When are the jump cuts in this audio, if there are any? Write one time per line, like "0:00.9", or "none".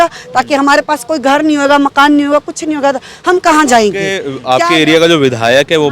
0:04.3

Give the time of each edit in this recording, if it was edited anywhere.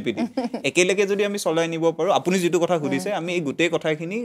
none

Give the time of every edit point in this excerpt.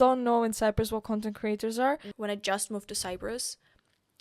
0:02.1

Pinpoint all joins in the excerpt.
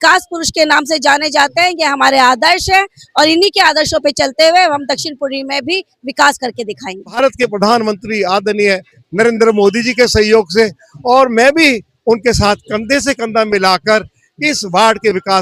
0:07.2

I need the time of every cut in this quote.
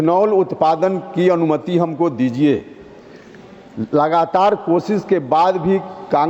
none

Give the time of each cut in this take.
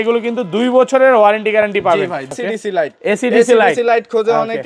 0:02.3

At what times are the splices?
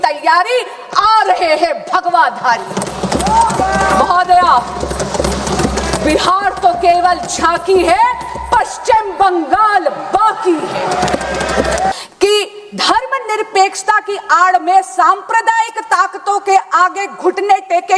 0:11.9

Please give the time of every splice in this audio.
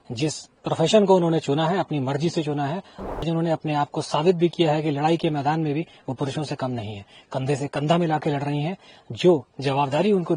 0:03.2

